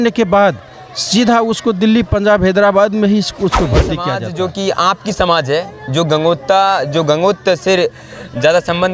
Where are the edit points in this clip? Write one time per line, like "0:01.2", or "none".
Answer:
0:04.1